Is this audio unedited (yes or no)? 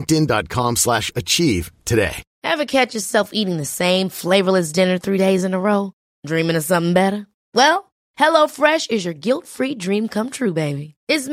no